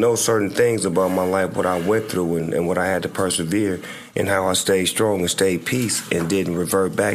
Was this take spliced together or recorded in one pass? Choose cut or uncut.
uncut